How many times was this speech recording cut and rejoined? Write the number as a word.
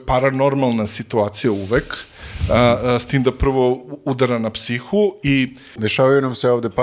one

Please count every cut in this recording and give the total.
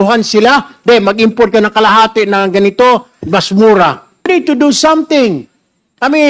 one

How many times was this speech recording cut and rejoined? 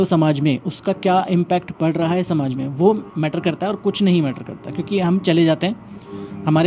zero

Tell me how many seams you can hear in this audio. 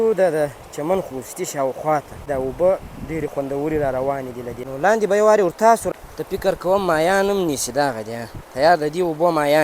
three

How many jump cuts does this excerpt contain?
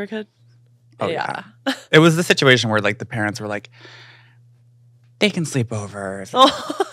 zero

